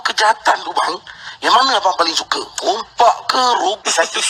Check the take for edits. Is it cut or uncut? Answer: uncut